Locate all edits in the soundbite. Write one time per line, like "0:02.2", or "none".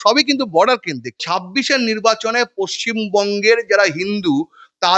0:01.3